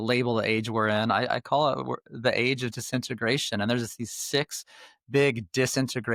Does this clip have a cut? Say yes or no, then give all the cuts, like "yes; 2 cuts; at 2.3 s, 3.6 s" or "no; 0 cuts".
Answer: no; 0 cuts